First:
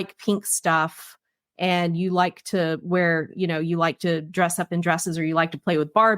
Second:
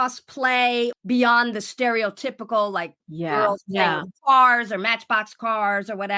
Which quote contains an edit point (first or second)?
second